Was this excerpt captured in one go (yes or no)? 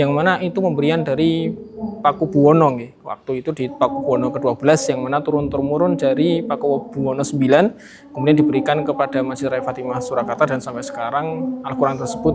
yes